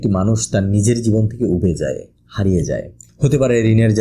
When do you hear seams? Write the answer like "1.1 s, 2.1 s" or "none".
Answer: 3.0 s